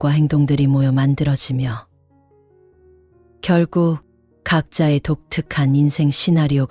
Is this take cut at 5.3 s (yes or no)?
no